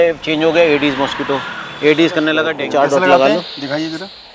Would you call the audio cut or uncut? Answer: cut